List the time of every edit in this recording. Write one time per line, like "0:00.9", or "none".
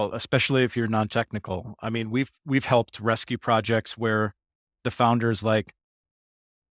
none

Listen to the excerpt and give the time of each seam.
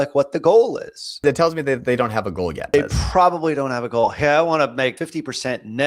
0:01.2
0:02.7
0:05.0

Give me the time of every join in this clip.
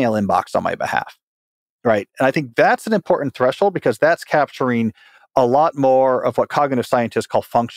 none

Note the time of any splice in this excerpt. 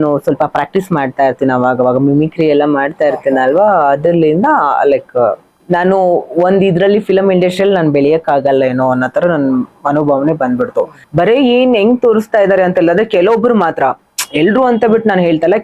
0:05.5
0:11.0

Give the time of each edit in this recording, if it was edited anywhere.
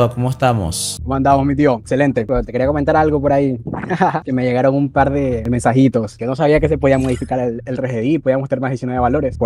none

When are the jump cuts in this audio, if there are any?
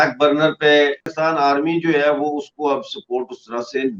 0:01.1

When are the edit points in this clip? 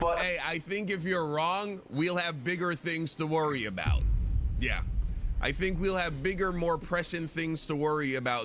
none

